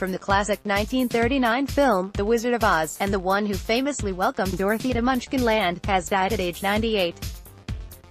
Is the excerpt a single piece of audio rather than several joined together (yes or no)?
no